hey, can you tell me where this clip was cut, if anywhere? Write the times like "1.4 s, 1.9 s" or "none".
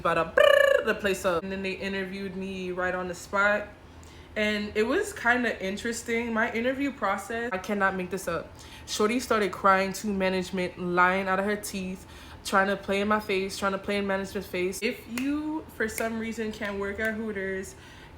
1.5 s, 7.5 s, 14.8 s